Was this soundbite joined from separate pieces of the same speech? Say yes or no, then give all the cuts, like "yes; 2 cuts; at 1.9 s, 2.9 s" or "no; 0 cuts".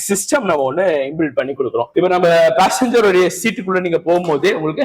yes; 1 cut; at 1.9 s